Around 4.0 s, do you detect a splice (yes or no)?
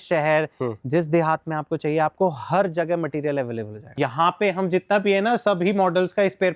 yes